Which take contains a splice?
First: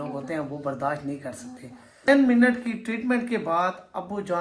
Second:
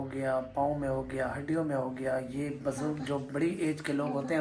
first; 1 cut; at 2.1 s

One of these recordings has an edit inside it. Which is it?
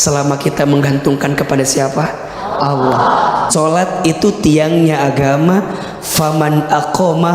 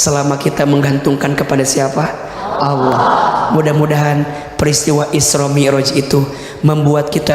first; 1 cut; at 3.5 s

